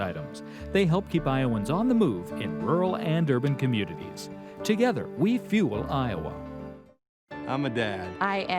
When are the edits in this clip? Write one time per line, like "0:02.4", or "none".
none